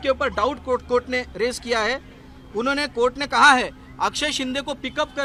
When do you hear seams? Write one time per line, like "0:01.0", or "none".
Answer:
none